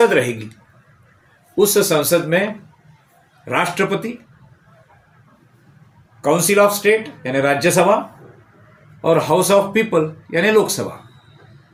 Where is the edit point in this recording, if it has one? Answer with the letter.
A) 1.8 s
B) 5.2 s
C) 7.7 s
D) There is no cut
D